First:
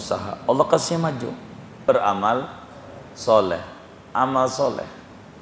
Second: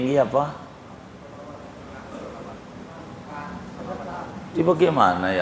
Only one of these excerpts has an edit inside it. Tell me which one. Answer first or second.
first